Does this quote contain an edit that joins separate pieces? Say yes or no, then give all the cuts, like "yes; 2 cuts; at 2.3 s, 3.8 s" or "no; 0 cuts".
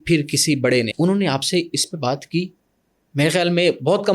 yes; 1 cut; at 0.9 s